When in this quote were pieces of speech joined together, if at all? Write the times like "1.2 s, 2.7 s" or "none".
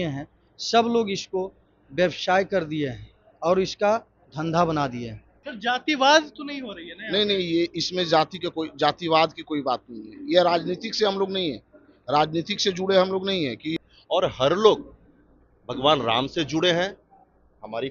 5.4 s, 13.8 s